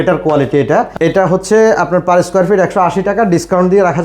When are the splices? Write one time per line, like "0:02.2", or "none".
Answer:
0:00.9